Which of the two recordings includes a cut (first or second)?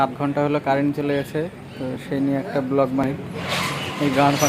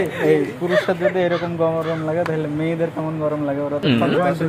first